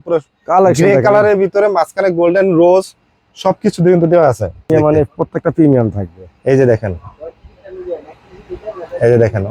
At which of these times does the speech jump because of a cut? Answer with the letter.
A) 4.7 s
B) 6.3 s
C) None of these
A